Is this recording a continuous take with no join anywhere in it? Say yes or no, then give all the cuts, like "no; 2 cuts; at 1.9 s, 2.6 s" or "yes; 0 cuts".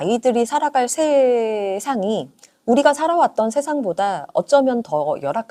yes; 0 cuts